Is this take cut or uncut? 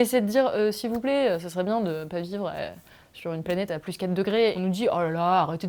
uncut